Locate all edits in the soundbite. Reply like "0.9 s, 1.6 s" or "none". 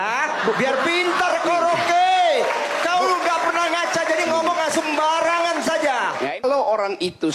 6.4 s